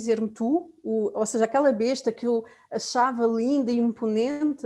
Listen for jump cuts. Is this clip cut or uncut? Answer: uncut